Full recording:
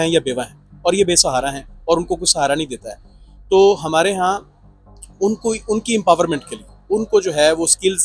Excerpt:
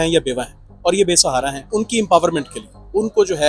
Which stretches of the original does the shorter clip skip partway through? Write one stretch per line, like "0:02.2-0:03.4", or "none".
0:01.6-0:05.6